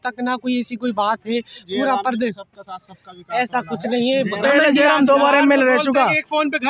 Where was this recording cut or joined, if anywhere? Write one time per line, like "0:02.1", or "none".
none